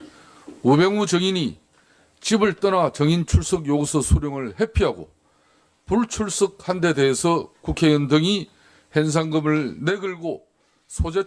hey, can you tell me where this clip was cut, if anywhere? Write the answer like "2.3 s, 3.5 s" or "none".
10.0 s